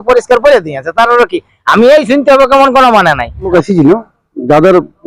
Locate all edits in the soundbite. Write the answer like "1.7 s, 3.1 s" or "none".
3.5 s